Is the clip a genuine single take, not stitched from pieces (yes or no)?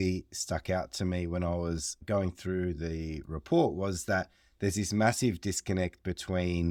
yes